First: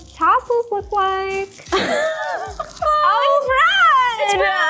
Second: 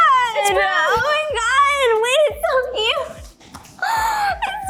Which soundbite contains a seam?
first; 2 cuts; at 1.6 s, 2.8 s

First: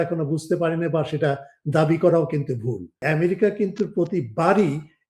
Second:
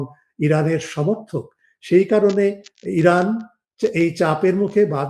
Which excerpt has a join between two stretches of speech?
first; 1 cut; at 3.0 s

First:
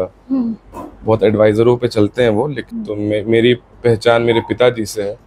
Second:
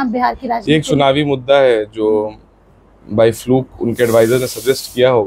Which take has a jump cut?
first; 1 cut; at 2.6 s

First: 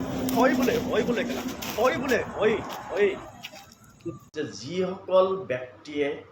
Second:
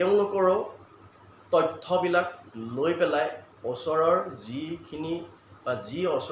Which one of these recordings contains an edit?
first; 1 cut; at 4.2 s

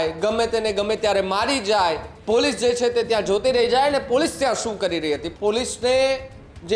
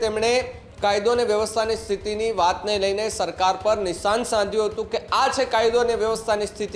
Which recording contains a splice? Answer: first; 2 cuts; at 2.1 s, 5.3 s

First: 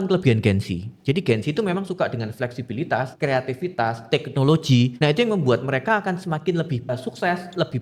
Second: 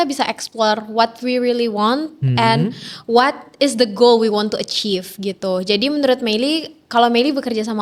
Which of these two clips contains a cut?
first; 3 cuts; at 3.1 s, 4.9 s, 6.9 s

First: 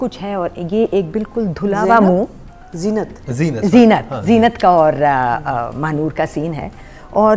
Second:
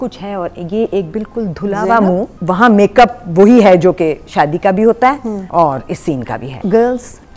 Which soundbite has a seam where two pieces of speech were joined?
second; 3 cuts; at 2.3 s, 5.4 s, 6.6 s

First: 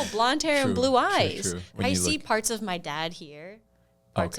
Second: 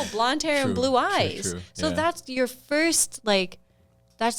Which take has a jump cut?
first; 1 cut; at 1.7 s

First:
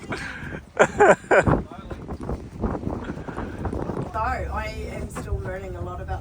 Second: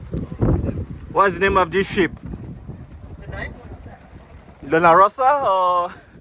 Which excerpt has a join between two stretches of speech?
first; 1 cut; at 4.1 s

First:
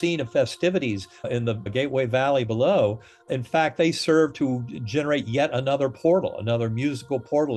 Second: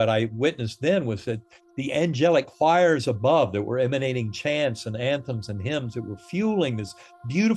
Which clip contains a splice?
first; 2 cuts; at 1.3 s, 3.3 s

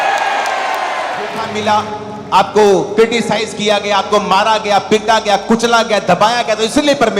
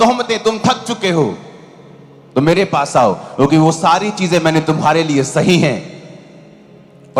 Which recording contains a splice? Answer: first; 1 cut; at 1.5 s

